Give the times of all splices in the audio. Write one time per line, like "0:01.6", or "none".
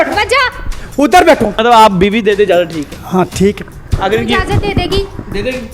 0:01.6

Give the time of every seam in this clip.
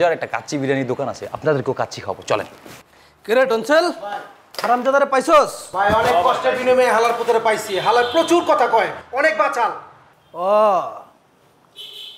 0:02.6

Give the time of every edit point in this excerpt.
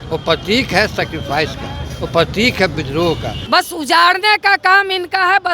0:03.3

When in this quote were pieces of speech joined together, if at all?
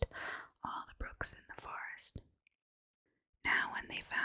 none

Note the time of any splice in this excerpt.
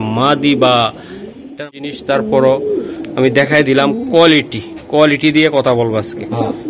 0:01.6

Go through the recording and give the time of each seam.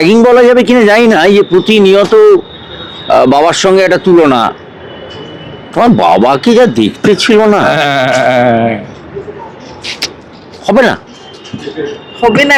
none

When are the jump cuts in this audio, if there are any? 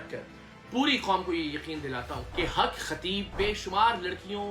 0:02.2
0:03.3

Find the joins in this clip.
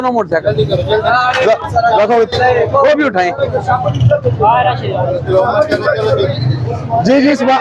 none

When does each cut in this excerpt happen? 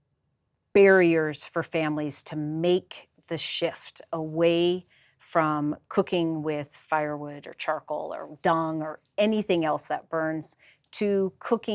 none

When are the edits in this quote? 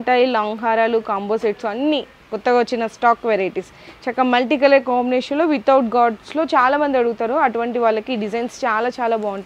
none

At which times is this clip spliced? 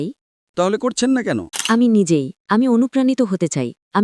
0:01.5

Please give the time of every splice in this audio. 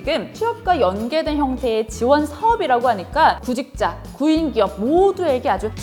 none

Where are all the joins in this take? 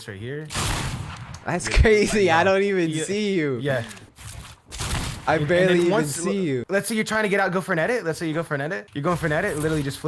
0:06.6
0:08.8

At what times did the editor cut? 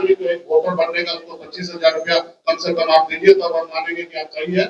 none

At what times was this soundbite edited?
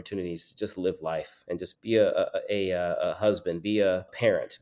none

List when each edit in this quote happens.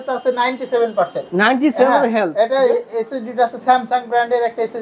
none

